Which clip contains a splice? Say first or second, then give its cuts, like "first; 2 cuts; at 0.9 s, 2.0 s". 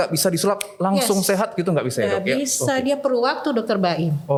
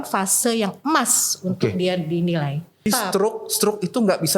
second; 1 cut; at 2.8 s